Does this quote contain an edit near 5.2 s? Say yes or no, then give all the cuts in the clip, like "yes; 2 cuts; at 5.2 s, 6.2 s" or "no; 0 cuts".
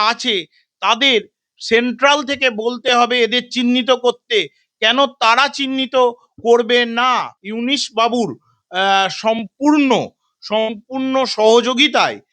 no; 1 cut; at 7.4 s